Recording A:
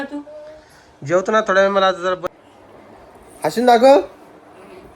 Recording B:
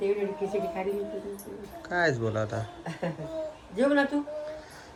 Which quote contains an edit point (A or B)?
A